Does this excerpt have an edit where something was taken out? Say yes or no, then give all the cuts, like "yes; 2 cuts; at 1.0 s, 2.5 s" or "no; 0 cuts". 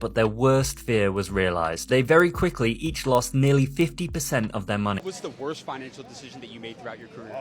yes; 1 cut; at 5.0 s